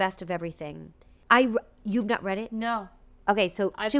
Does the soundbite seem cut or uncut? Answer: uncut